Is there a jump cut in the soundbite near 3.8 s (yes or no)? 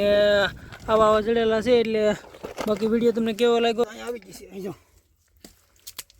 yes